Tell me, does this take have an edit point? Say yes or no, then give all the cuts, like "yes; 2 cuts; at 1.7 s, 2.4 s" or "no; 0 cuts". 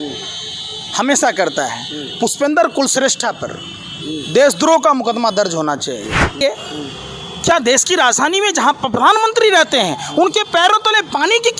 yes; 1 cut; at 6.4 s